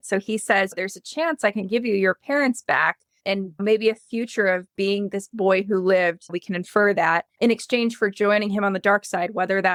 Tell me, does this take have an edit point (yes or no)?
no